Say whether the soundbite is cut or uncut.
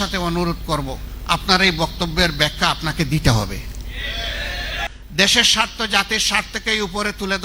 cut